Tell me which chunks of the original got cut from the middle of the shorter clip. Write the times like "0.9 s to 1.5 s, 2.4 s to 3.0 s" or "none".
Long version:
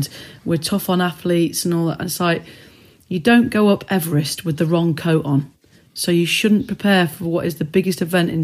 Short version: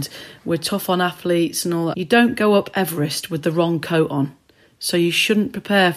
2.0 s to 3.1 s